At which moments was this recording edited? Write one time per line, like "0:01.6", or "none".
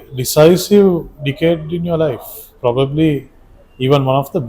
none